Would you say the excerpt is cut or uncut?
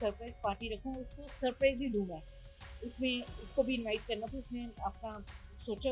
uncut